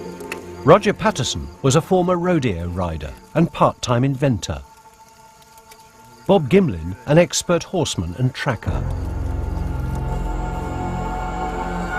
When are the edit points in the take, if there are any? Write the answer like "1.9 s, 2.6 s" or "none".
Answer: 9.9 s